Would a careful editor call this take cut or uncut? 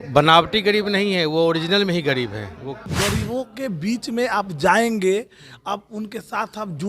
cut